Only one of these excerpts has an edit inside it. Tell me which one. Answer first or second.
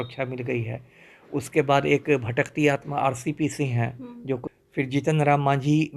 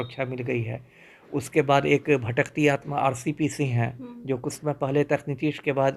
first